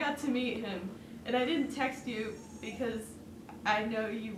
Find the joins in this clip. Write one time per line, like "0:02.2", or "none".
none